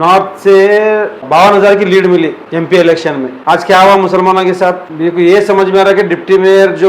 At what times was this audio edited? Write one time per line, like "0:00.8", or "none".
0:01.2
0:02.4
0:03.3
0:04.9